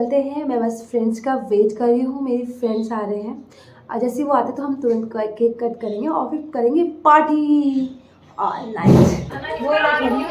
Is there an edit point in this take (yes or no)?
yes